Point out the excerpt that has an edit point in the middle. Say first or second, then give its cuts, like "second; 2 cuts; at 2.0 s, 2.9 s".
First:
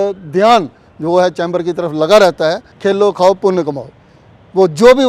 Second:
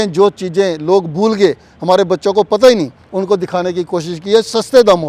first; 1 cut; at 2.7 s